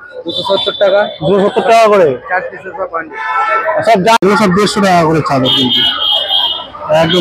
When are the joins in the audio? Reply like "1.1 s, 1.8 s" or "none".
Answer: 4.2 s

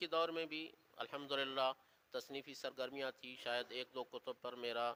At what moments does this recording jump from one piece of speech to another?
none

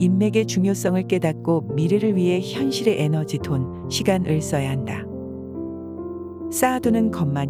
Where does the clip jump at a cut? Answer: none

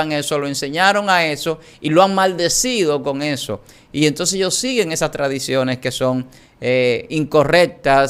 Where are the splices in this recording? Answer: none

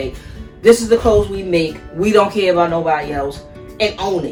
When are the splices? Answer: none

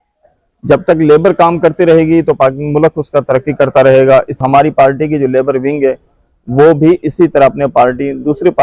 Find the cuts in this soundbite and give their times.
4.4 s

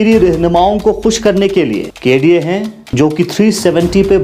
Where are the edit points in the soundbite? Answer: 1.9 s, 2.9 s

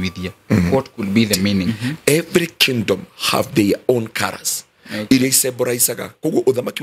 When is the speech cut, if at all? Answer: 1.7 s

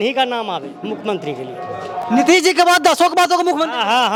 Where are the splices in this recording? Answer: none

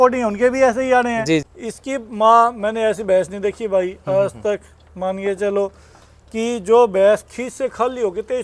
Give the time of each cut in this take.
1.5 s

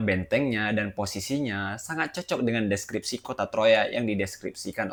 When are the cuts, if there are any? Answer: none

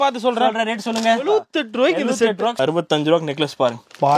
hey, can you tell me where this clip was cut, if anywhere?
2.6 s

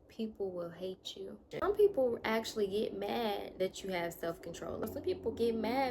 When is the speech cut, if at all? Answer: 1.5 s, 4.8 s

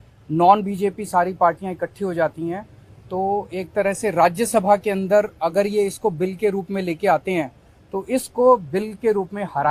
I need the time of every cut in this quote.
none

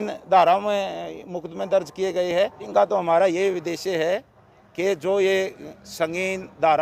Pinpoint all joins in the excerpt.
2.6 s

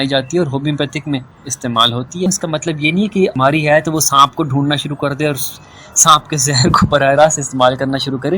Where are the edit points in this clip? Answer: 2.3 s, 3.4 s

